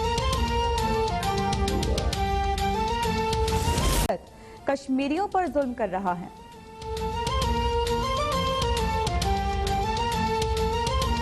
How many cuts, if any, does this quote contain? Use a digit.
0